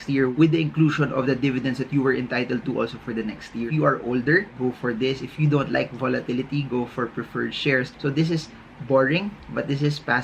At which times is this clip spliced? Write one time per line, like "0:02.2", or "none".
0:03.7
0:07.9